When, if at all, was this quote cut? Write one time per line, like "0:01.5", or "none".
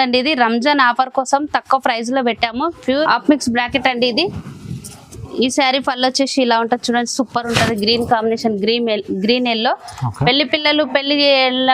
0:03.1